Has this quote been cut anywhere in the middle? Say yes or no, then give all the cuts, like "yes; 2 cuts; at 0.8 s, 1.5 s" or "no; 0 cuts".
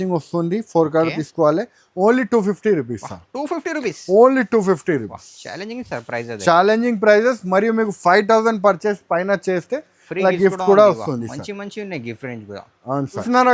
no; 0 cuts